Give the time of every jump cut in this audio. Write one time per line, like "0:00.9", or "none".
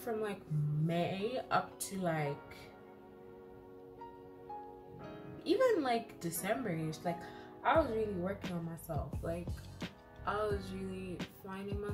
none